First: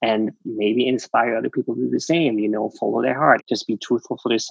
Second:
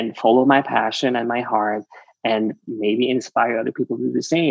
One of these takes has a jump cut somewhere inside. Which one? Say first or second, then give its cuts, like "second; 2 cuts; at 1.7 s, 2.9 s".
first; 1 cut; at 3.4 s